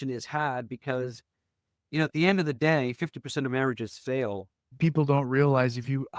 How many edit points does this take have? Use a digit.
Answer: 1